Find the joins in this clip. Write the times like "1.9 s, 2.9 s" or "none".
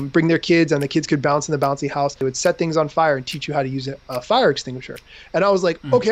2.2 s